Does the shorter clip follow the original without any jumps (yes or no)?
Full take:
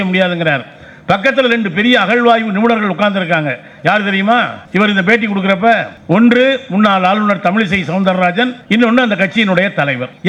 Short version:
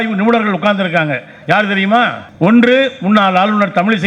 no